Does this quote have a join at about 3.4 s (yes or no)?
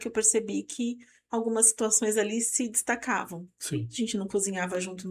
no